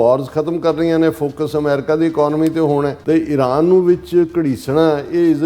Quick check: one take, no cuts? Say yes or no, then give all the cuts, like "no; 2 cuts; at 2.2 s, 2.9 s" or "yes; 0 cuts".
no; 1 cut; at 3.0 s